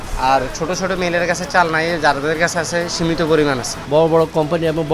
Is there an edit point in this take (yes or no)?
yes